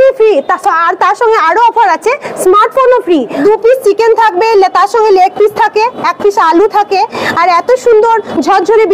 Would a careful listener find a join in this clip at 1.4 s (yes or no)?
no